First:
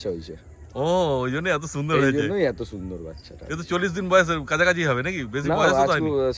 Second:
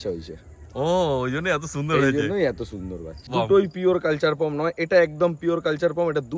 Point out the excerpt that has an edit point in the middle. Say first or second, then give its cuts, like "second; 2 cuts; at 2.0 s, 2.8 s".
second; 1 cut; at 3.3 s